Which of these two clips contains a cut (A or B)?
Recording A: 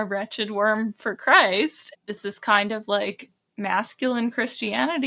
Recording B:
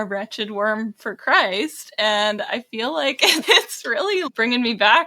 A